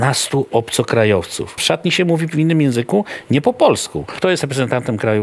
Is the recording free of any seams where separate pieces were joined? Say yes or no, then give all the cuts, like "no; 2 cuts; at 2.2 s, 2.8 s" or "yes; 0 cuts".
no; 2 cuts; at 1.5 s, 4.1 s